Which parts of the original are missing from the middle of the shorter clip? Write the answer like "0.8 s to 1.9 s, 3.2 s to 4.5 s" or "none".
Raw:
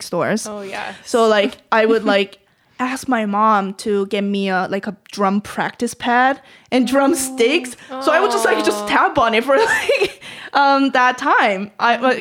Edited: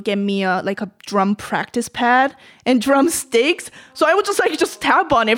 none